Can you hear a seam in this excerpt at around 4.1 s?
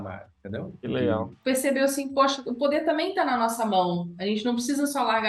no; 2 cuts; at 1.4 s, 2.4 s

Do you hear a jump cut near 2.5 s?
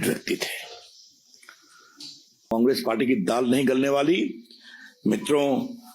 yes; 1 cut; at 2.5 s

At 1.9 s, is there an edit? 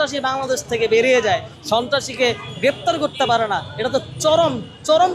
no; 0 cuts

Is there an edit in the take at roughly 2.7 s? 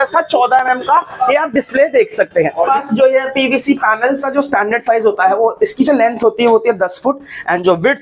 yes; 2 cuts; at 2.7 s, 4.2 s

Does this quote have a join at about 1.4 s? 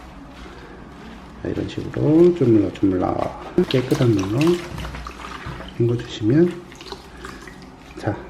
no; 1 cut; at 3.6 s

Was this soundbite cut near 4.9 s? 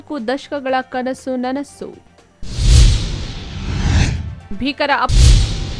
yes; 1 cut; at 4.9 s

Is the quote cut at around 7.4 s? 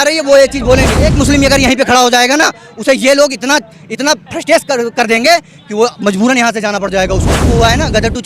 yes; 2 cuts; at 1.1 s, 7.4 s

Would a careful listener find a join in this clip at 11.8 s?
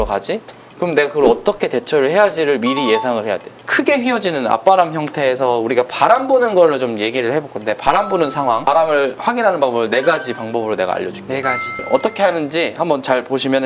yes; 2 cuts; at 3.6 s, 11.8 s

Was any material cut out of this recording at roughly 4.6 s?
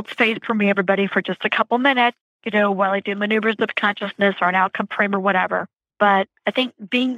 no; 3 cuts; at 2.3 s, 5.8 s, 6.3 s

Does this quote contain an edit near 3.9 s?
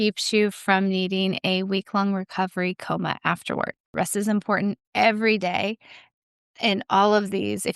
yes; 1 cut; at 3.9 s

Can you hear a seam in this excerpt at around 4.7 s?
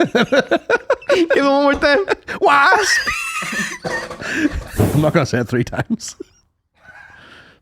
yes; 1 cut; at 4.7 s

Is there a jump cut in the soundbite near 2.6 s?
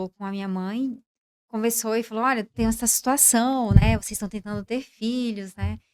no; 0 cuts

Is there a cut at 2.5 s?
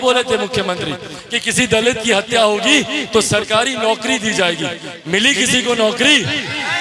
no; 0 cuts

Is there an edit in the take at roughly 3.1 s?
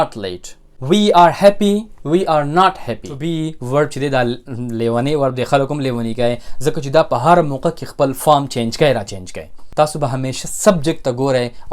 yes; 1 cut; at 3.1 s

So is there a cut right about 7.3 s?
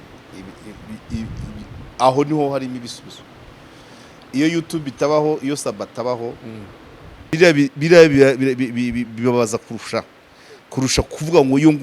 yes; 1 cut; at 7.3 s

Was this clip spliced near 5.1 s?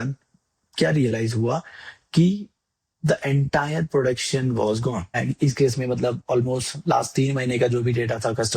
yes; 1 cut; at 5.1 s

